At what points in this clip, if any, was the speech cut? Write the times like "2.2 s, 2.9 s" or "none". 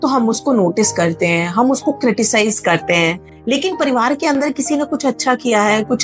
none